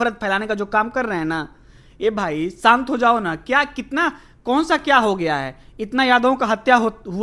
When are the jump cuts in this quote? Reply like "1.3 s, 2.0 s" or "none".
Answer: none